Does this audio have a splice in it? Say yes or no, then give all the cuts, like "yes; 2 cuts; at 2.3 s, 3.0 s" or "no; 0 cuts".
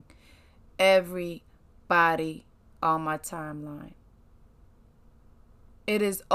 no; 0 cuts